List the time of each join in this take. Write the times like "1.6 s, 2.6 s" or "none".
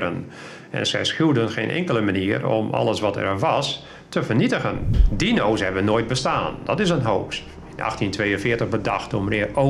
5.0 s